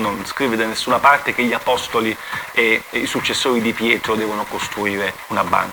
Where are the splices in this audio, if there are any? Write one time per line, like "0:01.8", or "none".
none